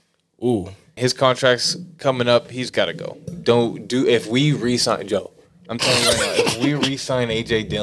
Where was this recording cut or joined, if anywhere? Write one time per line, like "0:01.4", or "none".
0:00.9